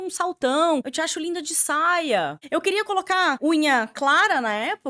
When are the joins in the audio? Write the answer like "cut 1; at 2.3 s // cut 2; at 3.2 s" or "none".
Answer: cut 1; at 0.9 s // cut 2; at 2.4 s // cut 3; at 3.4 s